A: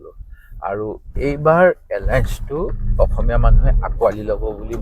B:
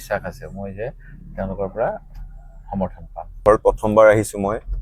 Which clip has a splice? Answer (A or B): B